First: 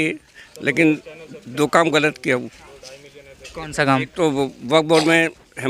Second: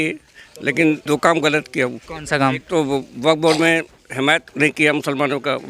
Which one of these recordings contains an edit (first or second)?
second